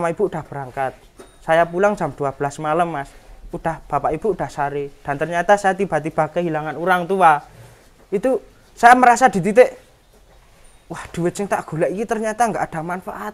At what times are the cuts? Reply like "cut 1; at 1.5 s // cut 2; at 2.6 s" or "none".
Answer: none